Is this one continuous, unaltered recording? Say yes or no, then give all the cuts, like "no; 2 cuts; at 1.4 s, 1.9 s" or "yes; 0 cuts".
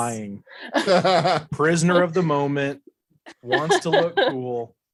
yes; 0 cuts